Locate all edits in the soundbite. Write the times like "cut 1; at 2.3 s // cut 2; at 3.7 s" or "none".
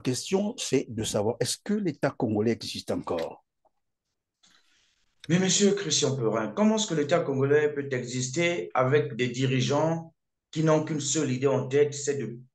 none